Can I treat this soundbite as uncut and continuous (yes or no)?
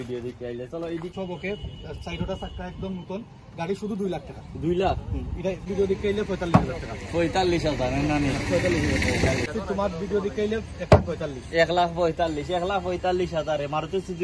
no